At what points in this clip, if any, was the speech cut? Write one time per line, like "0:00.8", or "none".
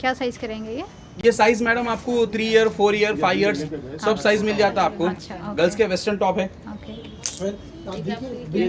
none